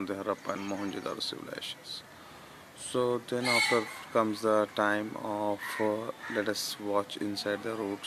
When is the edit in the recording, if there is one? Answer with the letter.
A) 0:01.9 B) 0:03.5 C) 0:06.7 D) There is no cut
D